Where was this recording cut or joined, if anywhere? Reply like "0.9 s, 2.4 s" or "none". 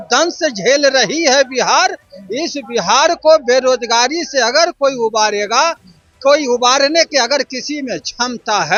none